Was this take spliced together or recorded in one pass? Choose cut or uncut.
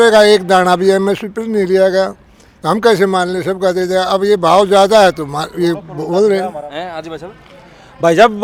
uncut